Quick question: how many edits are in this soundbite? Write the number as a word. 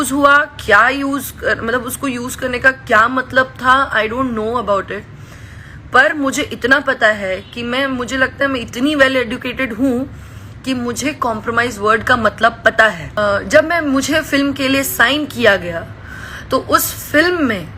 one